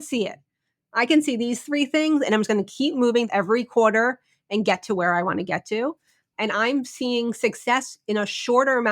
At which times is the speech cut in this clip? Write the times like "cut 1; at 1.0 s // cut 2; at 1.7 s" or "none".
cut 1; at 3.3 s // cut 2; at 6.3 s